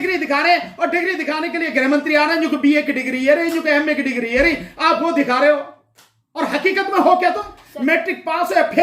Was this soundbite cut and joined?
no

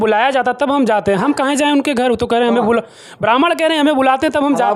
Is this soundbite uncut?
yes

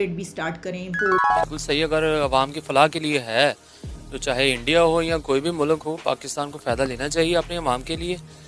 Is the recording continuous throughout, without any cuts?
no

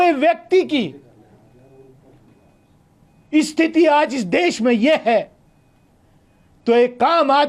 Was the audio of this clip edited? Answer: no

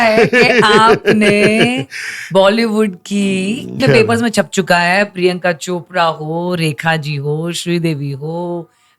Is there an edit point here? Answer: yes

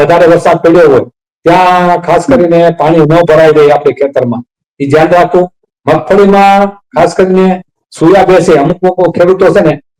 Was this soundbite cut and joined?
no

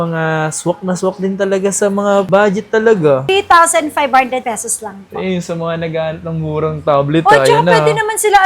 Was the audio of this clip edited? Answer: yes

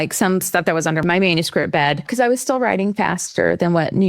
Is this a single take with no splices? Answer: no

